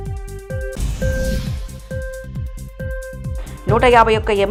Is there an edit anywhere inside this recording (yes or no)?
no